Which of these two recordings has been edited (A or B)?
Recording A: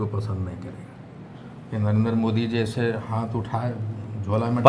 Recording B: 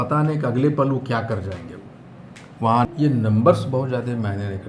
B